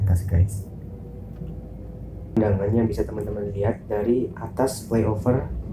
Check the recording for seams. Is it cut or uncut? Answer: cut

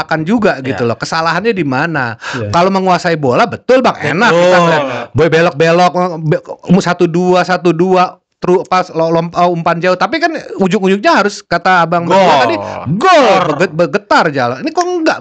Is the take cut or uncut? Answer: uncut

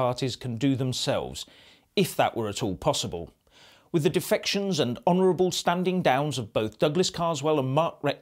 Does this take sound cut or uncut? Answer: uncut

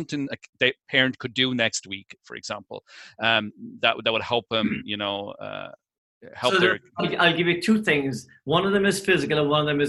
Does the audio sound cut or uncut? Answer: uncut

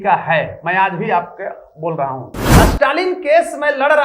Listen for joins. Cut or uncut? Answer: cut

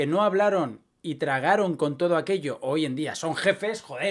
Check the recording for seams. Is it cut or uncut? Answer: uncut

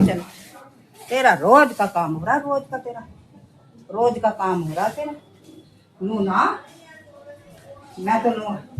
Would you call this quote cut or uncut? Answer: uncut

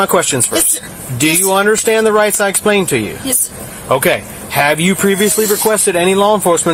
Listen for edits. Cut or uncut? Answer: uncut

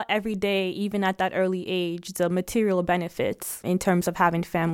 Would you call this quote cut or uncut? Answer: uncut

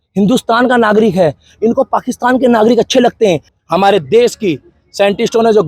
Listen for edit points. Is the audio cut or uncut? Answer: cut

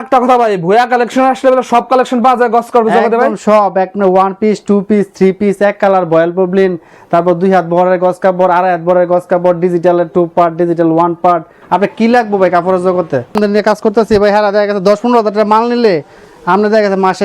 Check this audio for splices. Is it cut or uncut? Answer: cut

